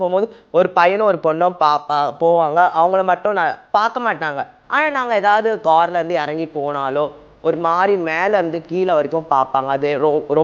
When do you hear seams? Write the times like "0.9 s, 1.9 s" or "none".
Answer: 3.6 s, 5.6 s